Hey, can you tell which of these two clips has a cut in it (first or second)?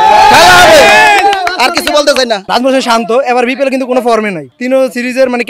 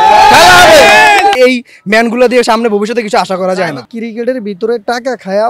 second